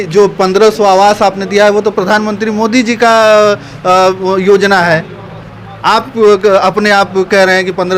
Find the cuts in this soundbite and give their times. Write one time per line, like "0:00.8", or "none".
none